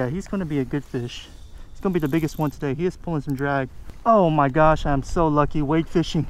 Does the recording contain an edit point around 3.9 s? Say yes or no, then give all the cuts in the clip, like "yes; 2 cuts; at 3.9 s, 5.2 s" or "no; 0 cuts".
yes; 1 cut; at 3.9 s